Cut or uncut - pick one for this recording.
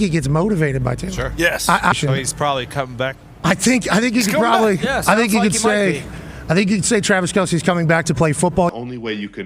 cut